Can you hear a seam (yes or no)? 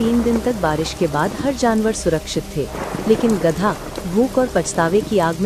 no